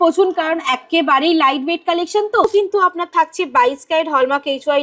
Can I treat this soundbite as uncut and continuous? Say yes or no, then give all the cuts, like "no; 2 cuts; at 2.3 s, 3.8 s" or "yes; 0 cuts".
no; 1 cut; at 2.4 s